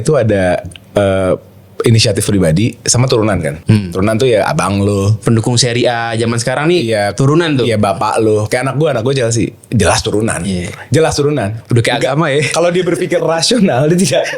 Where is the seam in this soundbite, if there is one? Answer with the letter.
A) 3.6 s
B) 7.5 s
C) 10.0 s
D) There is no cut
A